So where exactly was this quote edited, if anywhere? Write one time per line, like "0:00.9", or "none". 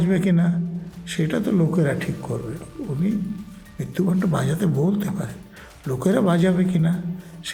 none